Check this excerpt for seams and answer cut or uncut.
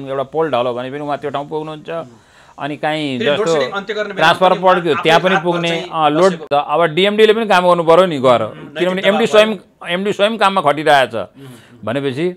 uncut